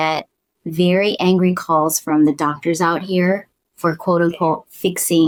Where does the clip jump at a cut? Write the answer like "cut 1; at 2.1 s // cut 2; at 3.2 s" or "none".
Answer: none